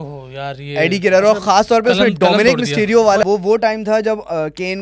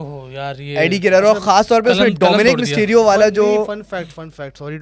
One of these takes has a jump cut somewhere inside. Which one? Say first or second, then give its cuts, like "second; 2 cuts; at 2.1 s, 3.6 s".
first; 1 cut; at 3.2 s